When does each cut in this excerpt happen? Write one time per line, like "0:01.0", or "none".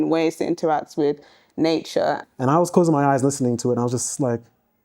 0:02.2